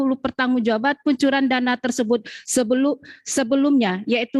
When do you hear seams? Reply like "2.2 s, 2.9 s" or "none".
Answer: none